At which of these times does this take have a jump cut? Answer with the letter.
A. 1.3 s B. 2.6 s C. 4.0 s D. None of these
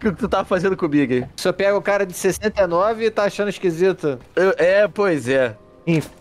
A